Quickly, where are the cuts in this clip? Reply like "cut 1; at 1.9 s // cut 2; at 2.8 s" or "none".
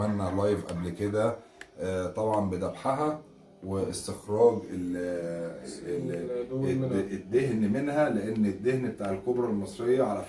none